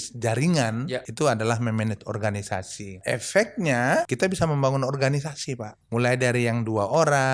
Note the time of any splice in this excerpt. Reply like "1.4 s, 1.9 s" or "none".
1.0 s, 3.0 s, 4.1 s, 5.7 s

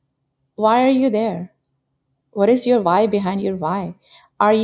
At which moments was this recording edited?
none

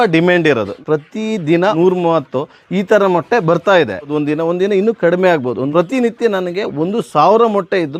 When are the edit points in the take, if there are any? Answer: none

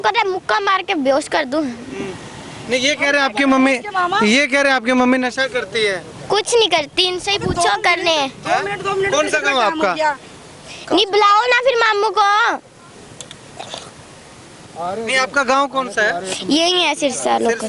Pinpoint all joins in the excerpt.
none

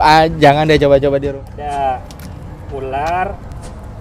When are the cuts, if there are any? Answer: 1.3 s

